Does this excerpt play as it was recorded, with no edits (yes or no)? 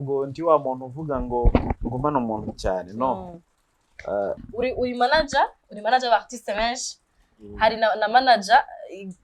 no